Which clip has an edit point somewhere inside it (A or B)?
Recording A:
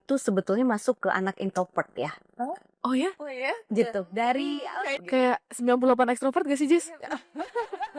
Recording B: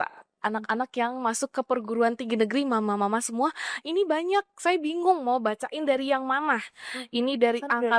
A